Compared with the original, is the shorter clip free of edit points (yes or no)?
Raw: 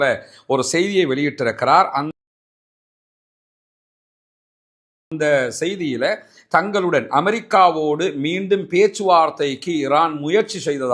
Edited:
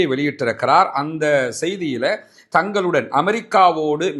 no